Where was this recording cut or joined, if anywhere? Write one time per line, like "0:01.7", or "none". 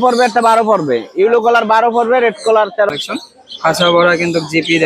0:02.9